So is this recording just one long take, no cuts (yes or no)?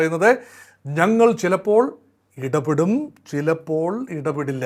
yes